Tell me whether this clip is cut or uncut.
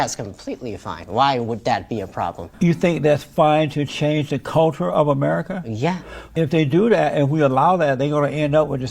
cut